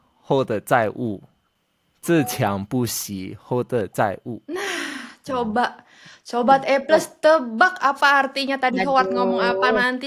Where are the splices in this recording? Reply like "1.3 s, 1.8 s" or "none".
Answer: none

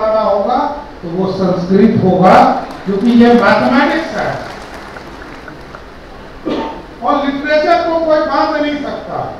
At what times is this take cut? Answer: none

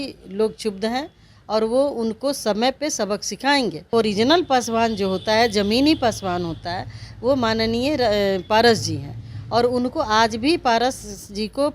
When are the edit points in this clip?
3.9 s

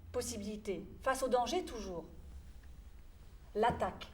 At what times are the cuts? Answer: none

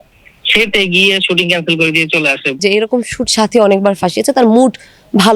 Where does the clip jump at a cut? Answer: 2.6 s

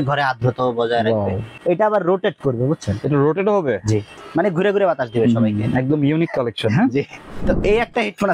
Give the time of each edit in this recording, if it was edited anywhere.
1.6 s, 4.2 s, 7.3 s

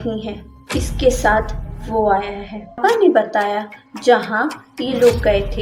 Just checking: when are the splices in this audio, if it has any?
none

